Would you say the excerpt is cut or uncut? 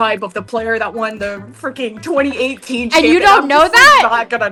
uncut